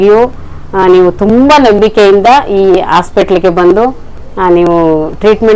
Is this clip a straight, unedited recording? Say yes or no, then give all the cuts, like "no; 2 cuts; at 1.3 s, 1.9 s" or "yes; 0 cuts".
yes; 0 cuts